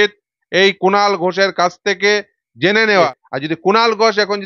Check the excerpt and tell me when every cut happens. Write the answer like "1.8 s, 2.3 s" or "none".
3.2 s